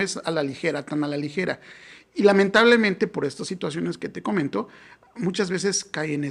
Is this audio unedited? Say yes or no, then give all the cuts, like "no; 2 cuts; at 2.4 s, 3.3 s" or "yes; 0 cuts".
yes; 0 cuts